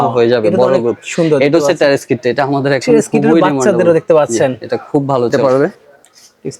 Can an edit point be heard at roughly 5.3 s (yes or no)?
yes